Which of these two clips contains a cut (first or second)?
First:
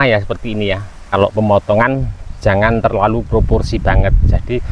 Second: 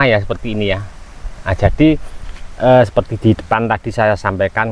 first